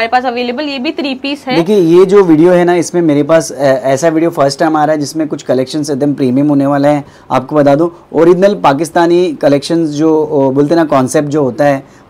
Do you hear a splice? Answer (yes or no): no